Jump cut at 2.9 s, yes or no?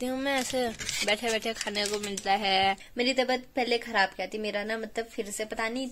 yes